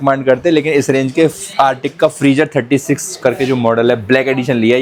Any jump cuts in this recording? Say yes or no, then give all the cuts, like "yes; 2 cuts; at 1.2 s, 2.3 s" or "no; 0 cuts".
no; 0 cuts